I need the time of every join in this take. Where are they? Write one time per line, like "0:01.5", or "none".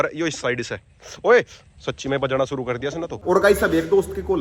0:03.2